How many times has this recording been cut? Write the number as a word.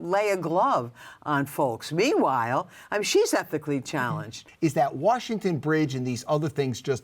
one